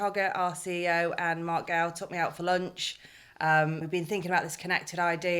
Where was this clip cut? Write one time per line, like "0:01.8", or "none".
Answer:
0:03.8